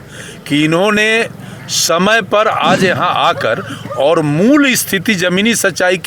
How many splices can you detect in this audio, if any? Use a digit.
0